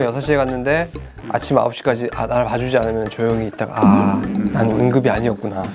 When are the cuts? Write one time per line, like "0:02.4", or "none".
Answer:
none